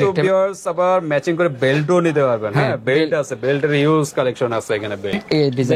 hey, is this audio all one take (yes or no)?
yes